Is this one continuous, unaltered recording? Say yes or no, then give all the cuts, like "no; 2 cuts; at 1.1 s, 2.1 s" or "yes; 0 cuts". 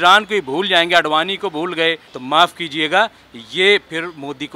no; 1 cut; at 2.1 s